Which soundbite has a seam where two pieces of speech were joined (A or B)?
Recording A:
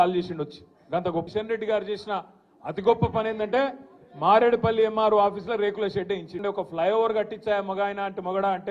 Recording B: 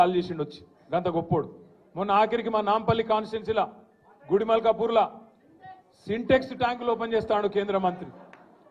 A